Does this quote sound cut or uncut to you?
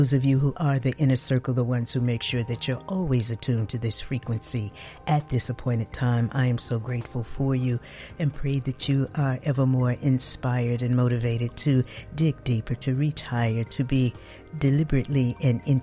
uncut